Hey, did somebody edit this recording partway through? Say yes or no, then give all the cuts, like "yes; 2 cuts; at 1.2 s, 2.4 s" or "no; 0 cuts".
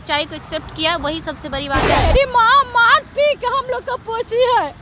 yes; 1 cut; at 2.0 s